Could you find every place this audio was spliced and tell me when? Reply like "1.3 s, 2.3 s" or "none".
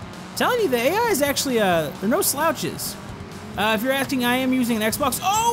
3.1 s